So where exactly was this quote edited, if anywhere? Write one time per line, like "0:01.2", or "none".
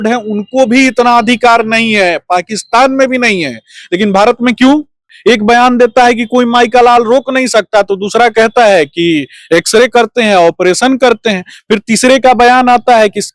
0:05.0